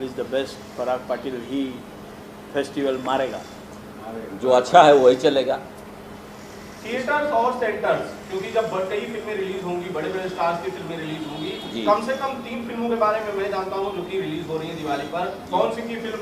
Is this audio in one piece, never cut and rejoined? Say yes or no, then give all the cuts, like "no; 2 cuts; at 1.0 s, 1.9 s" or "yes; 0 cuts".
yes; 0 cuts